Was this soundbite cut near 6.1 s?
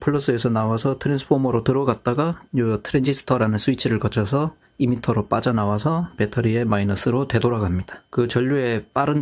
no; 2 cuts; at 2.4 s, 8.0 s

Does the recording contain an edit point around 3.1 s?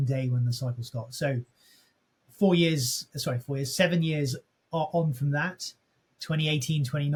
no; 0 cuts

